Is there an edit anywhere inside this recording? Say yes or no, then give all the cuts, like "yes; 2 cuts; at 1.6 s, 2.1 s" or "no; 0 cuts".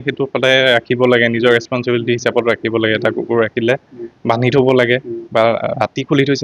no; 0 cuts